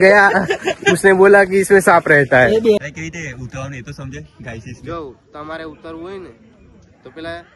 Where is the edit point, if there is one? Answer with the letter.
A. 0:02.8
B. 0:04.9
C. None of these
A